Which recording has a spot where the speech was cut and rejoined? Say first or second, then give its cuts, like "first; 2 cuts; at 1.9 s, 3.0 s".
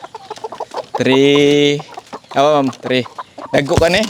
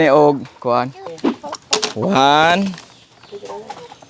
second; 1 cut; at 1.1 s